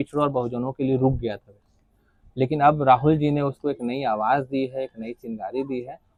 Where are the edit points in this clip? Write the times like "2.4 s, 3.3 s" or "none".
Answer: none